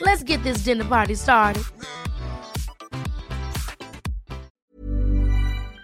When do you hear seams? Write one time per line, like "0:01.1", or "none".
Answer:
0:04.5